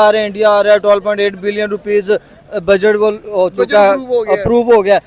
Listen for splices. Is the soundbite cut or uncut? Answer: uncut